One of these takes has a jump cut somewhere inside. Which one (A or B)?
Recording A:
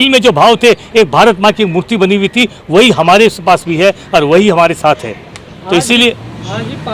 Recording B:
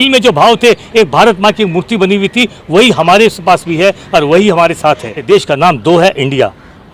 B